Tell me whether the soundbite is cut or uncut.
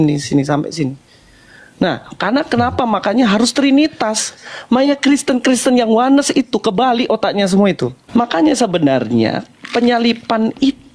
cut